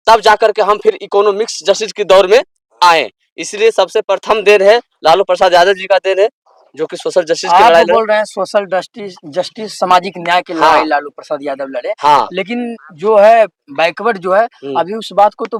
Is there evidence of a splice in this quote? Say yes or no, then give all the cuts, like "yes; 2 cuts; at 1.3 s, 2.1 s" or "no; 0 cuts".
no; 0 cuts